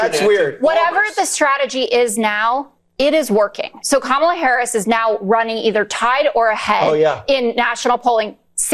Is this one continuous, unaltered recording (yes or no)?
yes